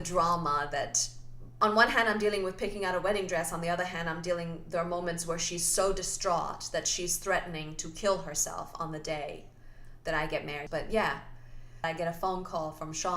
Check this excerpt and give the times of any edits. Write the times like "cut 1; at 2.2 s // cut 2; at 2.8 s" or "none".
cut 1; at 1.6 s // cut 2; at 10.6 s // cut 3; at 11.8 s